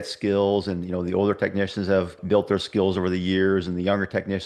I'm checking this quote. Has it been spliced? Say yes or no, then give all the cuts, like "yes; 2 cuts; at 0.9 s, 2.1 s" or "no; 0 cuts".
yes; 1 cut; at 2.2 s